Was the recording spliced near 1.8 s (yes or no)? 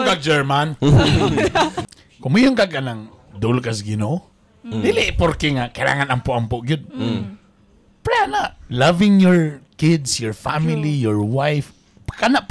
yes